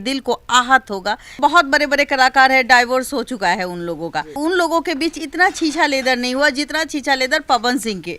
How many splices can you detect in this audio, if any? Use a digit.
2